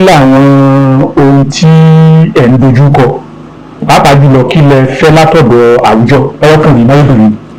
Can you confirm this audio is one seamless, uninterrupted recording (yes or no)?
yes